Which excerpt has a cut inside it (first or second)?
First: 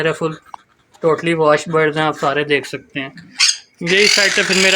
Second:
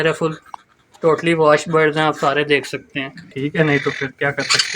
second